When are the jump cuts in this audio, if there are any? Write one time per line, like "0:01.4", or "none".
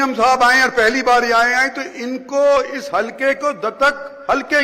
none